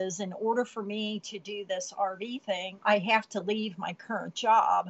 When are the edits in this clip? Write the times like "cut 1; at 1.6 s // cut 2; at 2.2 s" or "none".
cut 1; at 2.7 s